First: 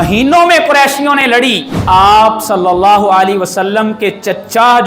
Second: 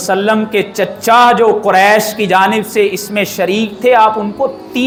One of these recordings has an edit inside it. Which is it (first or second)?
first